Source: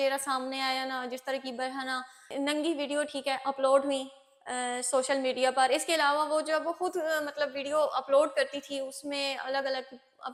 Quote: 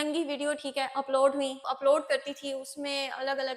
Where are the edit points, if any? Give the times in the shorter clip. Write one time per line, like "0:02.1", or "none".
0:01.7